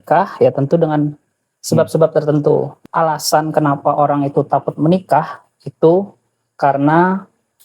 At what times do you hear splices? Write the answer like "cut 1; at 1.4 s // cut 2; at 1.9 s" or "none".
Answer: cut 1; at 2.7 s